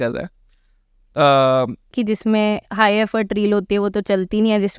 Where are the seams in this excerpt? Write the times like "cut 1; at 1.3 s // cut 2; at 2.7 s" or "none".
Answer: cut 1; at 1.9 s